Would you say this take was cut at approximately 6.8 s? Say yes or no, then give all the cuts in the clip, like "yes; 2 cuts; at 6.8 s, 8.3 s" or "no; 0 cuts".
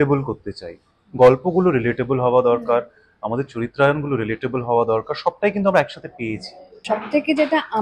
yes; 1 cut; at 6.8 s